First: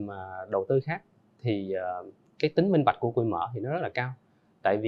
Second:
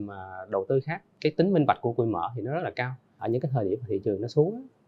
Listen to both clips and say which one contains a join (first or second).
second